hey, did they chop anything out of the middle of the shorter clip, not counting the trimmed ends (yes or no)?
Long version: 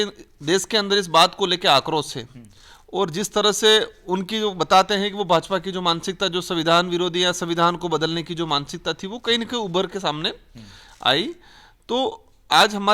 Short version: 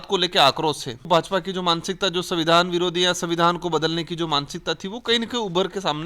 yes